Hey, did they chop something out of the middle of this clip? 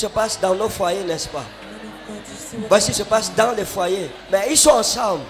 yes; 1 cut; at 4.1 s

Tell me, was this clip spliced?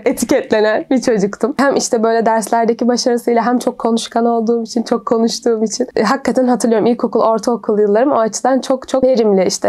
no; 0 cuts

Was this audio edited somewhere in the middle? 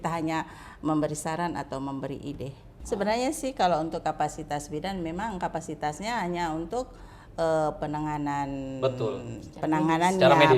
yes; 1 cut; at 2.7 s

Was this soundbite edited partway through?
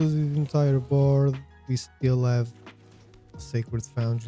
no; 0 cuts

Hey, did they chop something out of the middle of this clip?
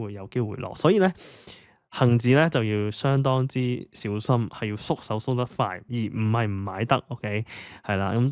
no; 0 cuts

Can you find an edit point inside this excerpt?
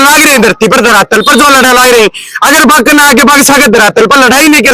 no; 0 cuts

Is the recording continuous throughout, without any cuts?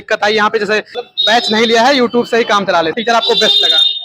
no; 2 cuts; at 1.0 s, 3.0 s

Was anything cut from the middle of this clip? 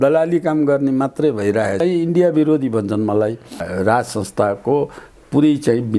yes; 2 cuts; at 1.8 s, 3.6 s

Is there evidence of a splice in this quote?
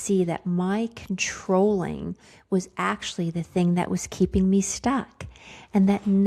no; 0 cuts

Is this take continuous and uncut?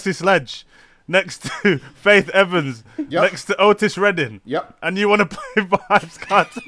yes; 0 cuts

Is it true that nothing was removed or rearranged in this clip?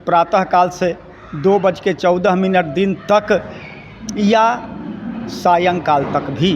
yes; 0 cuts

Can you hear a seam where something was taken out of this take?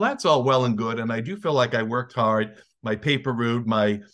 no; 0 cuts

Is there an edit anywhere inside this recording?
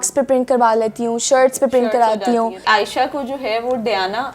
yes; 1 cut; at 2.6 s

